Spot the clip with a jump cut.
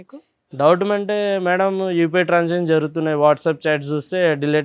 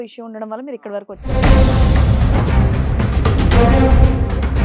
second; 1 cut; at 1.3 s

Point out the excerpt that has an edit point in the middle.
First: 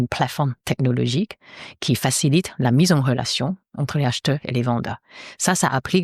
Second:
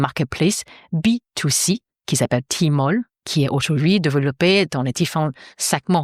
second; 1 cut; at 3.2 s

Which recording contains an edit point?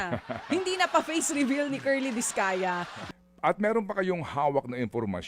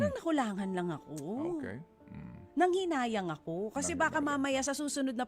first; 1 cut; at 2.9 s

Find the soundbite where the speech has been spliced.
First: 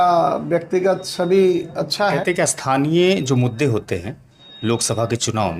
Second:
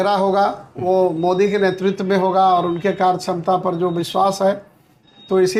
first; 1 cut; at 2.2 s

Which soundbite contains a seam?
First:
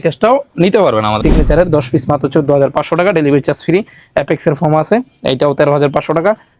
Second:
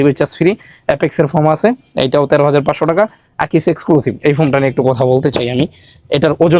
first; 1 cut; at 1.2 s

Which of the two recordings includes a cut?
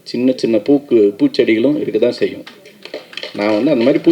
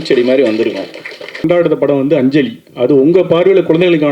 second; 1 cut; at 1.4 s

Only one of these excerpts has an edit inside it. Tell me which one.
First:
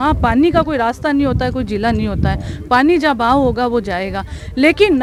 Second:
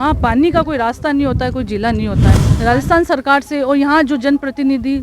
second; 1 cut; at 2.5 s

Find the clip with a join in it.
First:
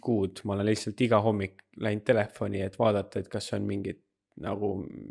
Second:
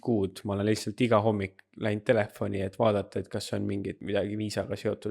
second; 1 cut; at 4.0 s

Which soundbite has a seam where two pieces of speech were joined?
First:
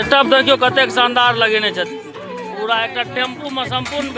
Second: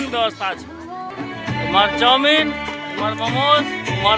second; 1 cut; at 1.1 s

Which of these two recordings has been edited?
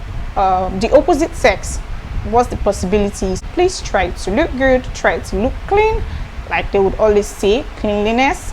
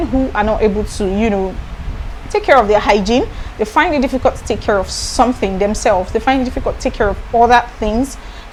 first; 1 cut; at 3.4 s

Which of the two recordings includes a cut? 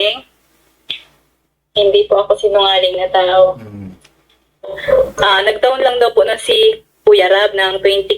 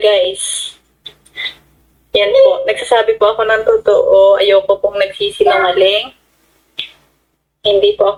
first; 1 cut; at 4.8 s

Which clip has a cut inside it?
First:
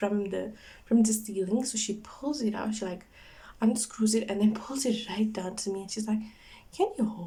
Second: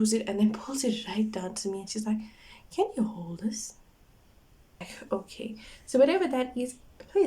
second; 1 cut; at 4.9 s

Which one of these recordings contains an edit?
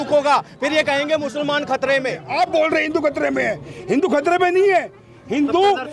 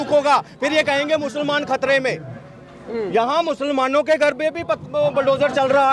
first; 1 cut; at 2.2 s

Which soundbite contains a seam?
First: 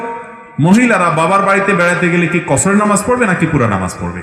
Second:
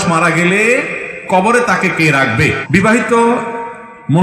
second; 1 cut; at 2.6 s

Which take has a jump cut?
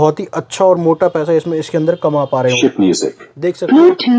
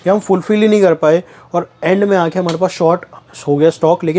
first; 1 cut; at 2.6 s

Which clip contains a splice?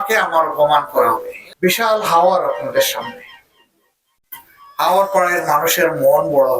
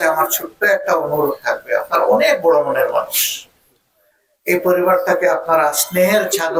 first; 1 cut; at 1.4 s

